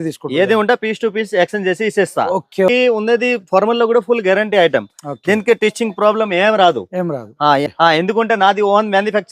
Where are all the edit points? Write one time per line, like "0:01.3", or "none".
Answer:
0:02.7
0:07.7

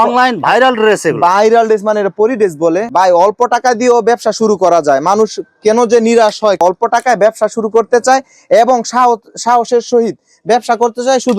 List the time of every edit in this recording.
0:02.9
0:06.6

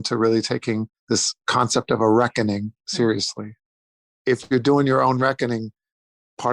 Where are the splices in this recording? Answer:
0:01.3
0:02.8
0:03.8

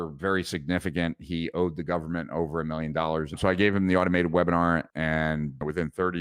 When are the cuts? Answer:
0:03.4
0:04.9

